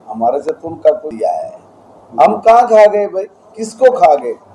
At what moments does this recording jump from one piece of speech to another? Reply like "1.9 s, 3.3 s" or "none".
1.1 s

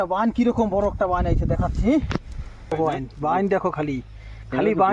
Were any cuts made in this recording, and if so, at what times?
2.7 s

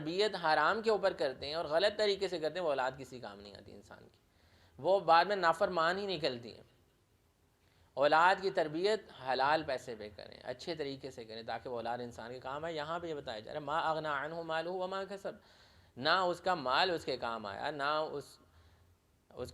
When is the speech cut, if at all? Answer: none

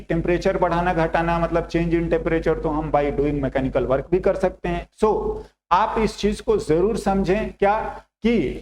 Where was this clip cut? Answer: none

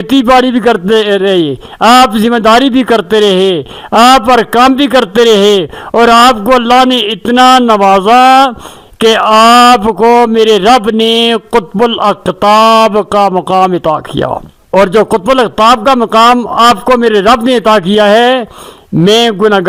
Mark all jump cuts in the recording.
none

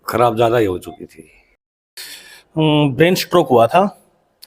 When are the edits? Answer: 1.8 s

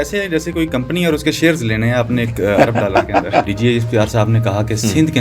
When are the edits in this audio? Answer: 3.5 s

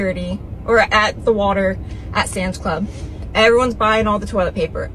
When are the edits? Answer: 3.2 s

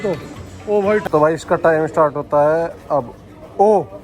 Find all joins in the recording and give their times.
1.1 s

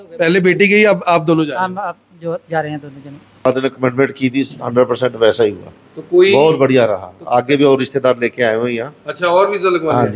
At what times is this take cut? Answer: 3.5 s

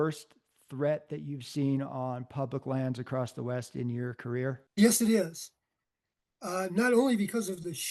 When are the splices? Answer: 4.6 s

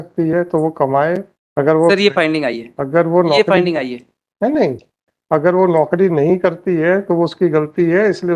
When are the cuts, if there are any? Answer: 1.4 s

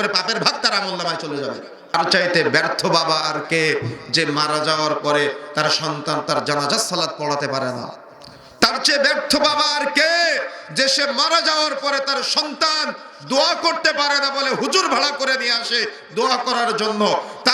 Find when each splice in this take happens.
1.9 s

